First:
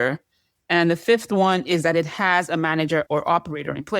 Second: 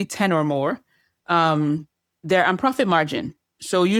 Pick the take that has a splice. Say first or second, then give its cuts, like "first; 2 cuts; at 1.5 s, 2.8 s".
first; 1 cut; at 3.1 s